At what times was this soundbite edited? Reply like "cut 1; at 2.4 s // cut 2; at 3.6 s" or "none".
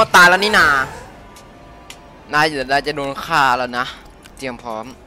cut 1; at 0.9 s